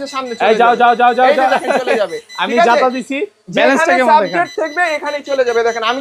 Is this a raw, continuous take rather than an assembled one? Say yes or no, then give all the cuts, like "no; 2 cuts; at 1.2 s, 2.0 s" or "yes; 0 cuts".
yes; 0 cuts